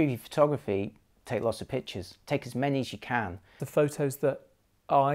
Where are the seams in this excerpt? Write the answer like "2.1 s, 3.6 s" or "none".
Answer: 3.6 s